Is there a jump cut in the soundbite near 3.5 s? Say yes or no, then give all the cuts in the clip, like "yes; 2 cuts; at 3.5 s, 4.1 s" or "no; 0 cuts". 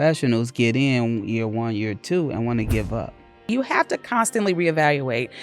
yes; 1 cut; at 3.5 s